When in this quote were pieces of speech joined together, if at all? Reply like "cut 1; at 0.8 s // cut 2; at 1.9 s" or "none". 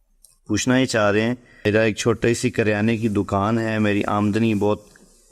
cut 1; at 1.5 s